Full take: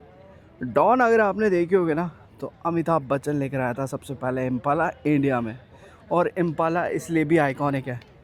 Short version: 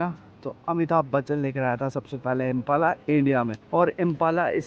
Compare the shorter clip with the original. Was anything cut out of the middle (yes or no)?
yes